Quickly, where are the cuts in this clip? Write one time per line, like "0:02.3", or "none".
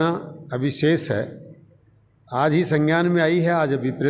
none